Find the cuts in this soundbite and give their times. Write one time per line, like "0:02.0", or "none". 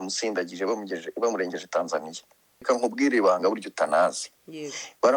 0:02.6